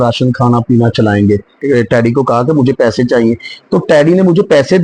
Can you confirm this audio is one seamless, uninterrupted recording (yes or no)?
no